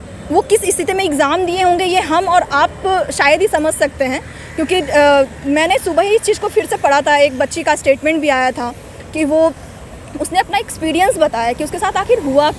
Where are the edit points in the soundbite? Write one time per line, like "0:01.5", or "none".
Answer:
none